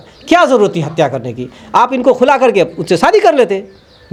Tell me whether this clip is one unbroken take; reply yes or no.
yes